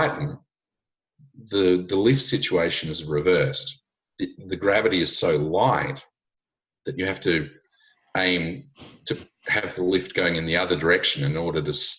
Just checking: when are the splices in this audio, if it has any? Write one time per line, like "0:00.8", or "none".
none